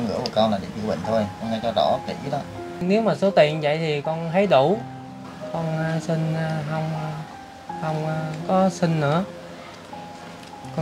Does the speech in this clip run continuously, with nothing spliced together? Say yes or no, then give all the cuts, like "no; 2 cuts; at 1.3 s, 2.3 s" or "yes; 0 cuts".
no; 1 cut; at 2.8 s